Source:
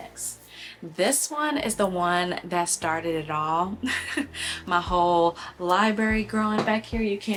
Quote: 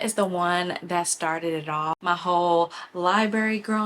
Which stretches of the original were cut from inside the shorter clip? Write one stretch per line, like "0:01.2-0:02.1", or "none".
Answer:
0:03.5-0:04.6